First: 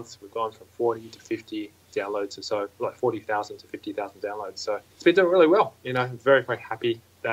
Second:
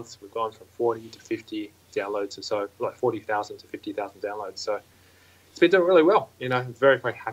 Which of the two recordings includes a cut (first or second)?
first